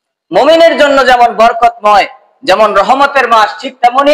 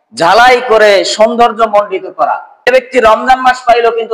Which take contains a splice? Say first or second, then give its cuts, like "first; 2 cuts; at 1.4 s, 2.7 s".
second; 1 cut; at 2.5 s